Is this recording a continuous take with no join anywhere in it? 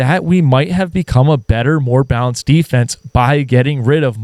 yes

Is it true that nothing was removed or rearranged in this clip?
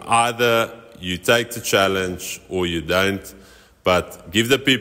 yes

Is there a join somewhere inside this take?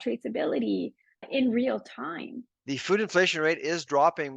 yes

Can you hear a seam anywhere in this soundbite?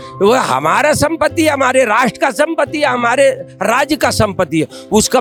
no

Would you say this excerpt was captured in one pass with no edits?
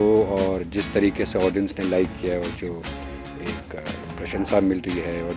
yes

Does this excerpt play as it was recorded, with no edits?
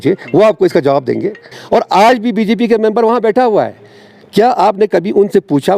no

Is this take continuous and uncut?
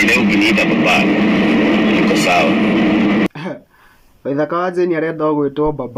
no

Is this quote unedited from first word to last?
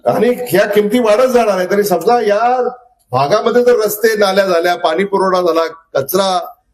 yes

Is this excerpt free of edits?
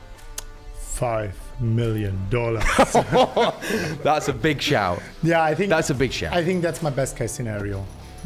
yes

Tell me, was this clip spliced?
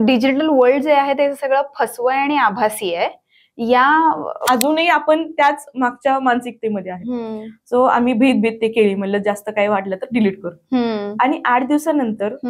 yes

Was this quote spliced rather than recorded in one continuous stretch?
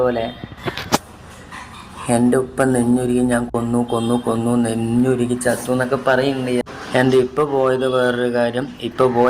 yes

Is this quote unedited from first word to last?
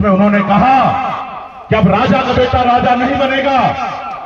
yes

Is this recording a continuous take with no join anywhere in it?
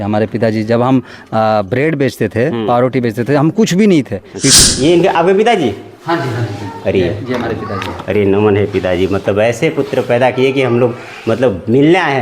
no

